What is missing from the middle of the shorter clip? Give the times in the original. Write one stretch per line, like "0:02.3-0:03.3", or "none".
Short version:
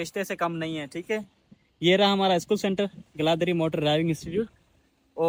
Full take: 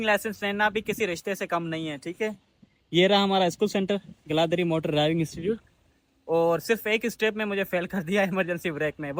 none